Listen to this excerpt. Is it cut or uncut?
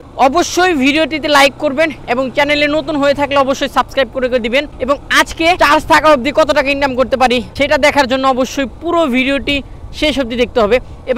cut